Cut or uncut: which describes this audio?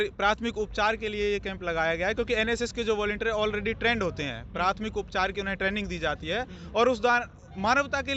uncut